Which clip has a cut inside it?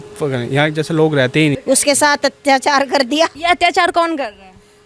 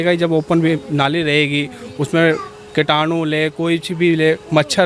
first; 2 cuts; at 1.6 s, 3.4 s

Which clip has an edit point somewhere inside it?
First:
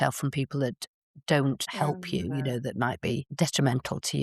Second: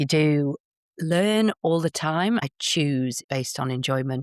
second; 1 cut; at 2.8 s

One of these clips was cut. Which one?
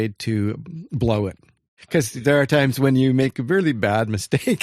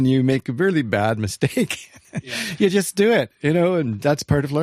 first; 1 cut; at 1.7 s

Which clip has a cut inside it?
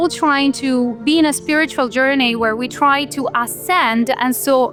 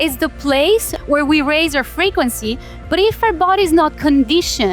second; 1 cut; at 0.9 s

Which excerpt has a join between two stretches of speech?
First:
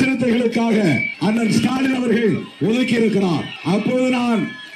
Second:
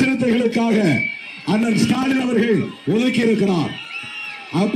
first; 2 cuts; at 1.1 s, 3.5 s

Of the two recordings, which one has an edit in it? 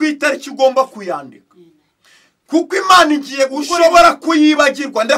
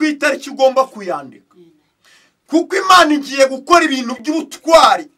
first; 1 cut; at 3.6 s

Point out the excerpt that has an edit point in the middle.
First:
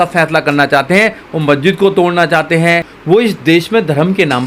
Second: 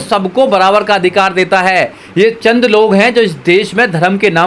first; 1 cut; at 2.9 s

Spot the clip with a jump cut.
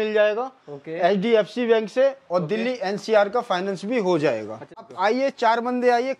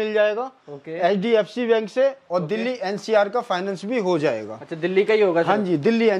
first; 1 cut; at 4.8 s

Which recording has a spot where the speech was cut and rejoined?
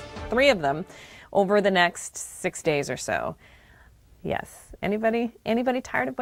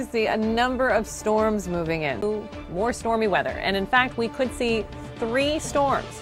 second; 1 cut; at 2.2 s

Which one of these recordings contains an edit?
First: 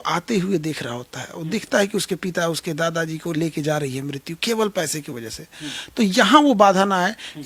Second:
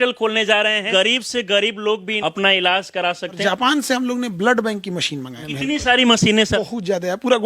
second; 5 cuts; at 0.8 s, 2.1 s, 3.4 s, 5.4 s, 6.6 s

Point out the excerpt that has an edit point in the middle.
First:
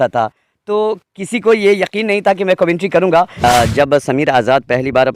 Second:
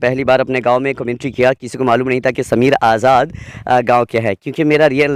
first; 1 cut; at 3.4 s

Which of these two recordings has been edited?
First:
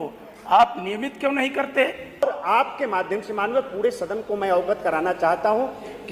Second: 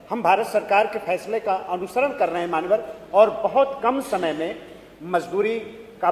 first; 1 cut; at 2.2 s

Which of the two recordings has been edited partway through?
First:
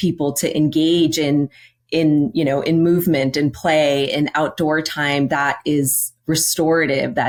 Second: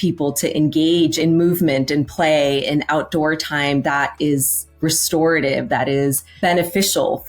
second; 2 cuts; at 1.2 s, 6.3 s

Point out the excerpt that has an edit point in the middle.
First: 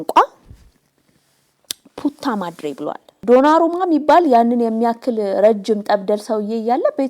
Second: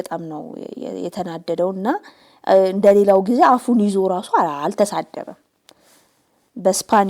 first; 1 cut; at 3.1 s

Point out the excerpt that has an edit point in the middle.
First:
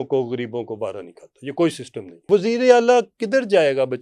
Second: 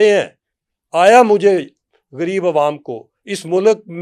first; 1 cut; at 2.2 s

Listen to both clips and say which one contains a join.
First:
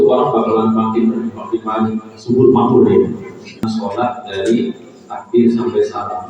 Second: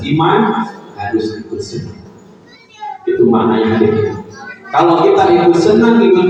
first; 1 cut; at 3.7 s

